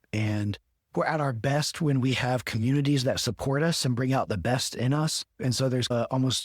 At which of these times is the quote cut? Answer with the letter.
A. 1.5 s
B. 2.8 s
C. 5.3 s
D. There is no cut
C